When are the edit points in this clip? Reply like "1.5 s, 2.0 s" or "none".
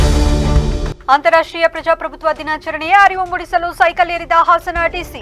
none